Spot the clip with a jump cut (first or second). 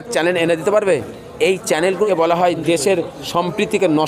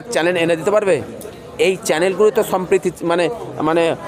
first